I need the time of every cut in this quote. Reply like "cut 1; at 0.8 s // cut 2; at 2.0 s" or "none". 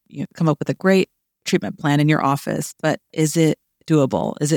none